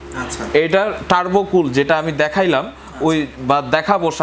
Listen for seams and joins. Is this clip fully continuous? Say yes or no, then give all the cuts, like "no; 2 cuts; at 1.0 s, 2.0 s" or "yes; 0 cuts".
yes; 0 cuts